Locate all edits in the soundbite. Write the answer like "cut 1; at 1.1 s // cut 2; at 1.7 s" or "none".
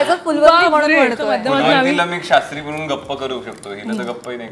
cut 1; at 1.4 s